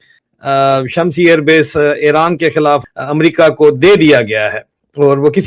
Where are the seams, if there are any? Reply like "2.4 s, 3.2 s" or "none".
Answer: 2.9 s

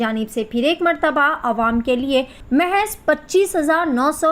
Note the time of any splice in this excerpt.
2.4 s

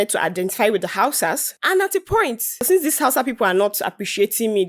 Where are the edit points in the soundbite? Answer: 1.5 s, 2.6 s

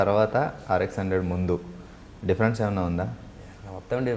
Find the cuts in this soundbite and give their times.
none

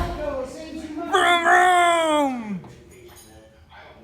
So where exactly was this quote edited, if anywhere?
none

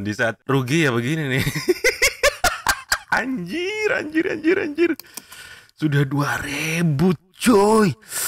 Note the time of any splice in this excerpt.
3.1 s

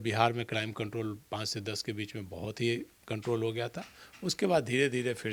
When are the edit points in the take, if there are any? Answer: none

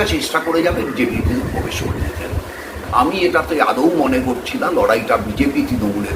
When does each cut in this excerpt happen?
2.9 s

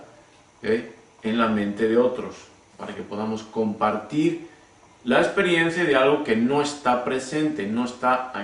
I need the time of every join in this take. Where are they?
6.2 s

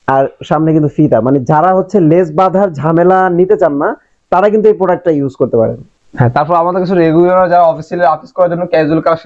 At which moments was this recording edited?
none

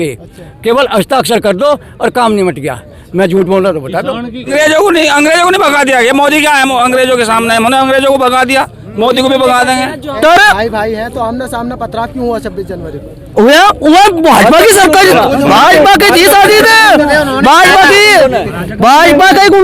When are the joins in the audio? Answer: 4.5 s, 10.2 s

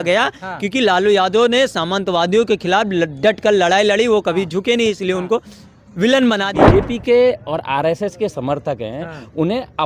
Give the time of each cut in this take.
6.5 s

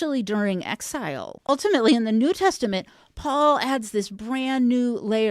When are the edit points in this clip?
1.4 s

